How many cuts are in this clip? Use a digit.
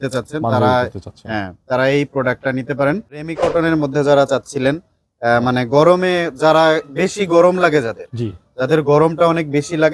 1